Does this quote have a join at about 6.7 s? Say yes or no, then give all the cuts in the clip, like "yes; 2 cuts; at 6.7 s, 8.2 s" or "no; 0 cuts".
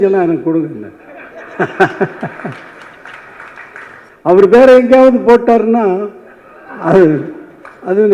no; 1 cut; at 4.1 s